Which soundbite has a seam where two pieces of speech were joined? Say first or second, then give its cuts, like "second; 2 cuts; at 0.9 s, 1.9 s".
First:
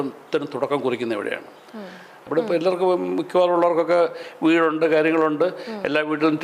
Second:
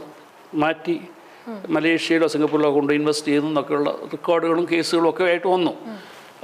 first; 1 cut; at 2.2 s